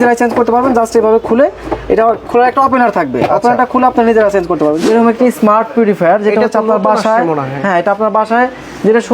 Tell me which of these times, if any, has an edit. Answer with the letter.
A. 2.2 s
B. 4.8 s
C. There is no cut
B